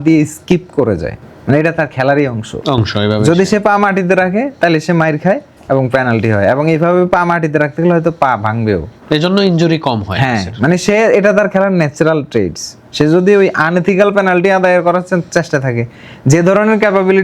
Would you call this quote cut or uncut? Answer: uncut